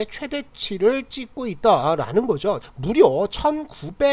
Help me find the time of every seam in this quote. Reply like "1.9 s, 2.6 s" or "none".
2.7 s